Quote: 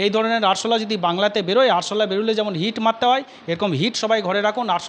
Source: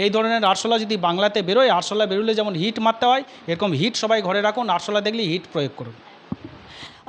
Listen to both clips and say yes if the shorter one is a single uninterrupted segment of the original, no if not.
yes